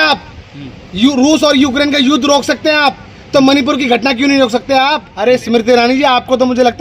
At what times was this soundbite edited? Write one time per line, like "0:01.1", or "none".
0:05.1